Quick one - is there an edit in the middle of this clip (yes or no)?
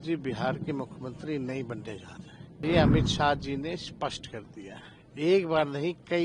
yes